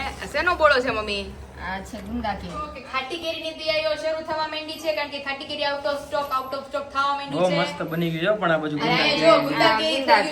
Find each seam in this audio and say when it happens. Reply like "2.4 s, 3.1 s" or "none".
2.8 s

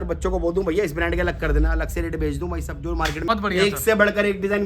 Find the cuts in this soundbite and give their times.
3.3 s

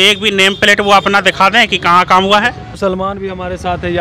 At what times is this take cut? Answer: 2.7 s

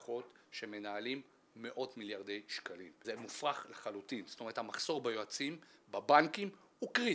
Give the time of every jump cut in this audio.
2.9 s

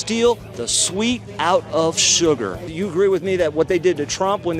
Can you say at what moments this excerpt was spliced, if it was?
2.6 s

